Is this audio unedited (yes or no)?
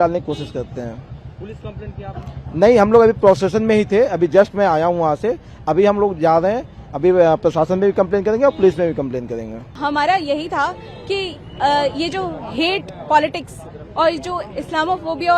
yes